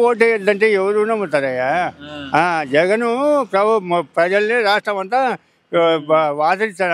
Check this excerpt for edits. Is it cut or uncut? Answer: uncut